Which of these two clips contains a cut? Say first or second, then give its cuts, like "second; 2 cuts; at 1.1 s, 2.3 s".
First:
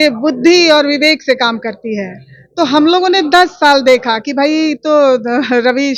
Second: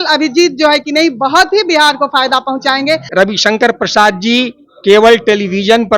second; 1 cut; at 3.1 s